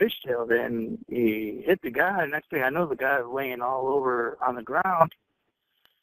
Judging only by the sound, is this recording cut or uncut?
cut